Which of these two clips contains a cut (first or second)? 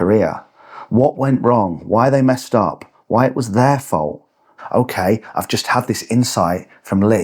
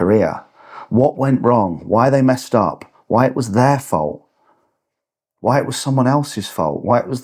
first